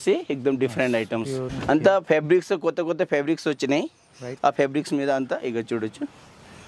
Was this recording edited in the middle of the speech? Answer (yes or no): yes